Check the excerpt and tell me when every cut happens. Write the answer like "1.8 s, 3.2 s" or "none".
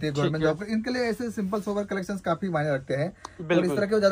none